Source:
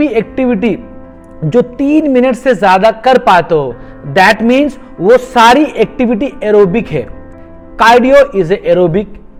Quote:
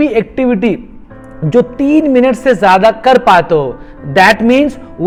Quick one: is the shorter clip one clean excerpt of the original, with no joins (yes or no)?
yes